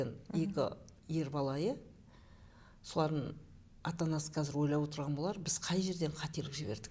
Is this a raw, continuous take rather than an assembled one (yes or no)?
yes